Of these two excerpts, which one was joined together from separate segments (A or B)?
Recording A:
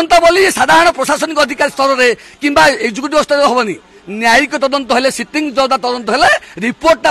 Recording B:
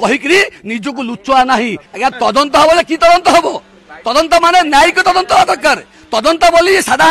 B